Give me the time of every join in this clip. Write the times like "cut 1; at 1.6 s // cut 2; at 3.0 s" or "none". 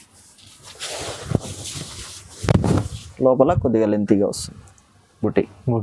none